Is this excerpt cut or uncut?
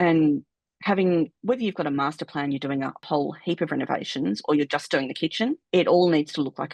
cut